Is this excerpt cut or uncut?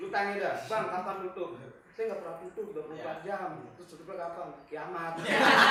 uncut